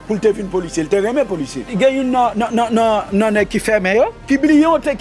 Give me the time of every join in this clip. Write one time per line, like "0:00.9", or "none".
0:01.7
0:04.2